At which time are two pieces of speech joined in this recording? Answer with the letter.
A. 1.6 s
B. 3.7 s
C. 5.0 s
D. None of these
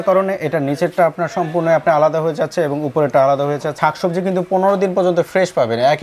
B